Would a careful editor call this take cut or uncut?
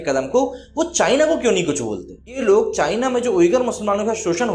cut